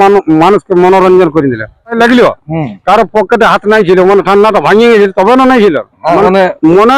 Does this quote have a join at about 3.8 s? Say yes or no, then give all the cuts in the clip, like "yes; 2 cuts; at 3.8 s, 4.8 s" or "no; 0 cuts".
no; 2 cuts; at 1.9 s, 6.2 s